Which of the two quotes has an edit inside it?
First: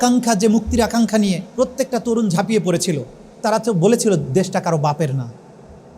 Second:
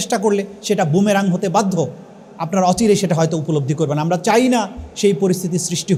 first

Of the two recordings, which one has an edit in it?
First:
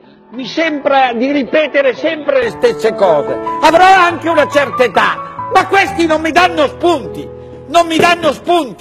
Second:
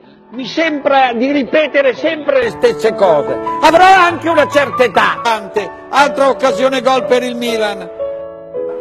first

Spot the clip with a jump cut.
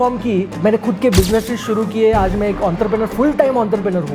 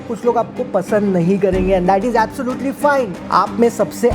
second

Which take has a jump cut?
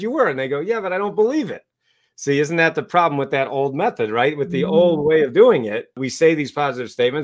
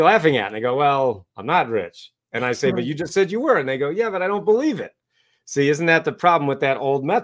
first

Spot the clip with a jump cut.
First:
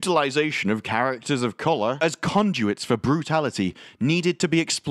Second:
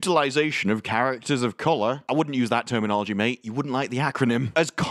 first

